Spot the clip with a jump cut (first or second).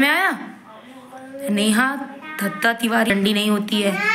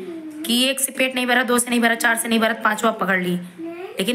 first